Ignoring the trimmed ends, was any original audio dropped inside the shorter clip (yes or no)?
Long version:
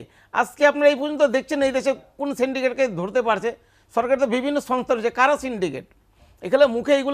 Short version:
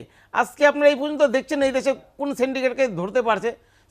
no